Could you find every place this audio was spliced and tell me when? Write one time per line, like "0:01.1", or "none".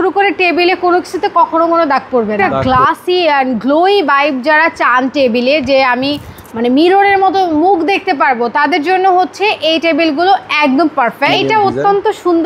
0:02.5
0:11.3